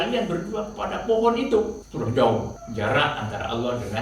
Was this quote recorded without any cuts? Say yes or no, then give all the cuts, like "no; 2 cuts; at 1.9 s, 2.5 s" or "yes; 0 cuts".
no; 2 cuts; at 1.8 s, 2.6 s